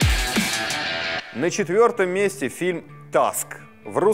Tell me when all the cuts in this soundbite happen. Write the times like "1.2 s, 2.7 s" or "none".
1.2 s